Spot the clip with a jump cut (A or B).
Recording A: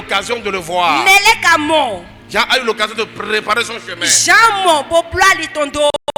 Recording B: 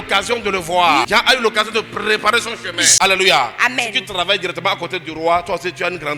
B